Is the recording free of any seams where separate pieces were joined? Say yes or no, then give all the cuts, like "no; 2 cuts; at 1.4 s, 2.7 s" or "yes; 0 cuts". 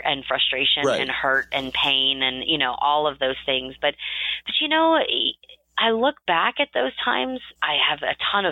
no; 1 cut; at 7.5 s